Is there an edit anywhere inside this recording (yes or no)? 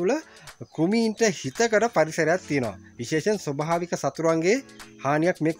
no